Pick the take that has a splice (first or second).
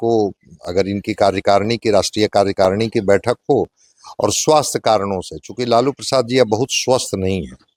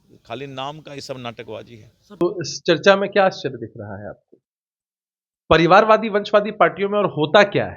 second